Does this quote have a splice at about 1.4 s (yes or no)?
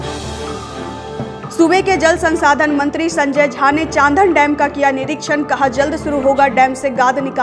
yes